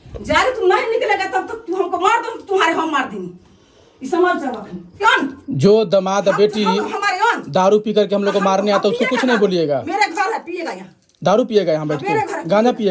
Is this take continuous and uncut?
no; 1 cut; at 5.0 s

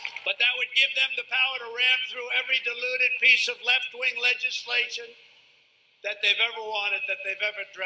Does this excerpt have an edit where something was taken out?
yes; 1 cut; at 5.3 s

